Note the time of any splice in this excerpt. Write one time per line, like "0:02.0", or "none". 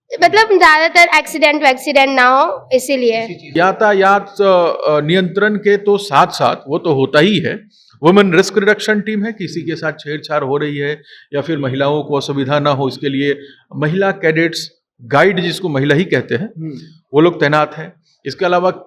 0:03.5